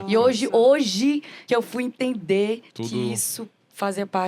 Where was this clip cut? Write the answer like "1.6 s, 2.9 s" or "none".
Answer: 1.3 s, 2.7 s